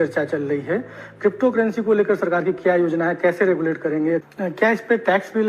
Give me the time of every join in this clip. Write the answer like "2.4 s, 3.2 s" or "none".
4.2 s

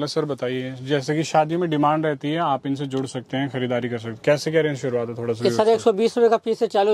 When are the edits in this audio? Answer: none

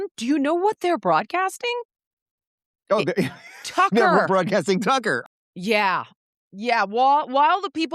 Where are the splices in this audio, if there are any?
5.3 s

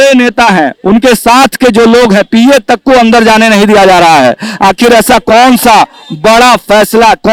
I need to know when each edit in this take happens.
none

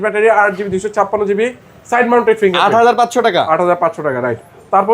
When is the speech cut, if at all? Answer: none

